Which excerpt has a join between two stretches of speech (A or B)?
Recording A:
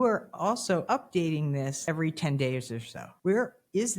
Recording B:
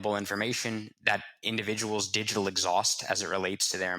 A